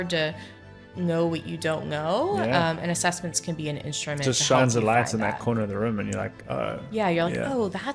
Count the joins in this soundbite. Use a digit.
0